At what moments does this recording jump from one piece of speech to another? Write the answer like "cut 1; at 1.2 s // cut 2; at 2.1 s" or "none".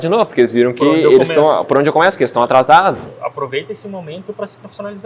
cut 1; at 3.1 s